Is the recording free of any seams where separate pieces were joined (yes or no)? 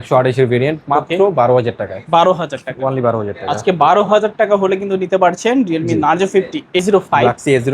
no